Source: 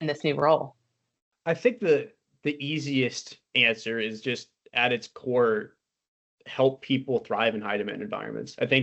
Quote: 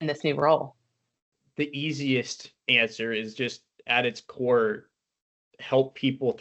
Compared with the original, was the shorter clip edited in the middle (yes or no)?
yes